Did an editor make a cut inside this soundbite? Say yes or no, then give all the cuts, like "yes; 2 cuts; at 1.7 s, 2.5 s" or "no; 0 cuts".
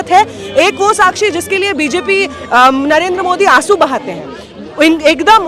no; 0 cuts